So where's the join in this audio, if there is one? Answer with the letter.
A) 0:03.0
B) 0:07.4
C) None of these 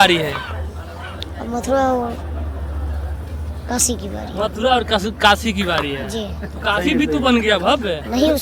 C